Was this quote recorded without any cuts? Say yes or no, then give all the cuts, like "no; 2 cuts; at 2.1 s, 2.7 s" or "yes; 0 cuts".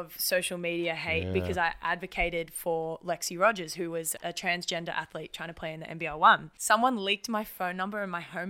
no; 2 cuts; at 4.1 s, 6.5 s